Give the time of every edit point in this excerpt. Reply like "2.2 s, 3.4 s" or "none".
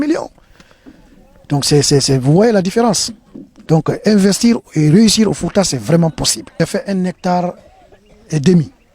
6.6 s